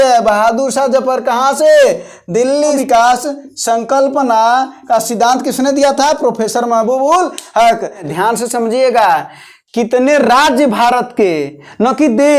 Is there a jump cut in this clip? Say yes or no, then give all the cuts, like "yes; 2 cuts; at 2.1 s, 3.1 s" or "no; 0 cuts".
yes; 2 cuts; at 2.8 s, 8.1 s